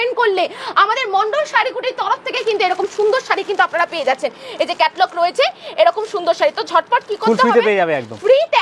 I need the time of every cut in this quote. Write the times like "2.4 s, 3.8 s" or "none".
none